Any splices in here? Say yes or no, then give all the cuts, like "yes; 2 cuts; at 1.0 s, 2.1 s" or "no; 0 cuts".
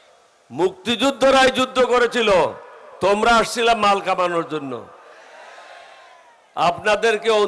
no; 0 cuts